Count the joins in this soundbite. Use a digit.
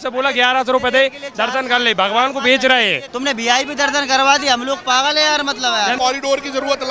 2